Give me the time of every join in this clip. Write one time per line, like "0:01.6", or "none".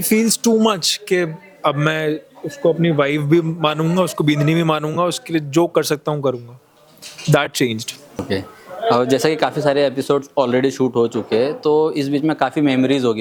none